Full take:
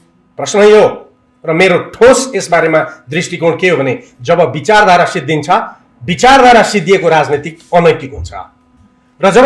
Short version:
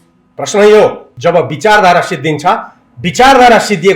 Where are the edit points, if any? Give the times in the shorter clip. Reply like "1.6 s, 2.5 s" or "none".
1.1 s